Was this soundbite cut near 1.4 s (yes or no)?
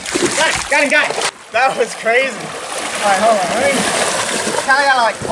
yes